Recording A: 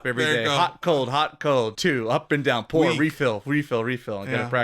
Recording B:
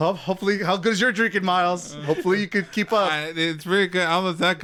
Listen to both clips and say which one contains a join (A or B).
A